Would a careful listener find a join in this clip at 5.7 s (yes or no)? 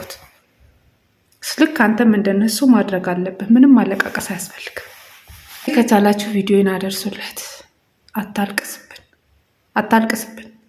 yes